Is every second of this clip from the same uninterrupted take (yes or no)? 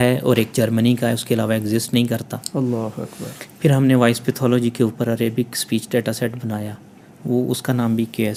yes